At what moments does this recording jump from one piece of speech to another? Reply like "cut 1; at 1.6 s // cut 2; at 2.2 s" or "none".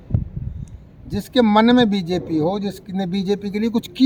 none